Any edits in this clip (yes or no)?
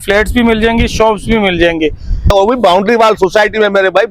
yes